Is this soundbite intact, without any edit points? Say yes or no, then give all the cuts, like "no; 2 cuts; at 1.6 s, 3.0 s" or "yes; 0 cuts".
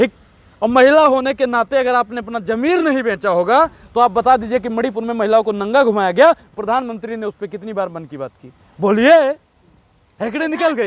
yes; 0 cuts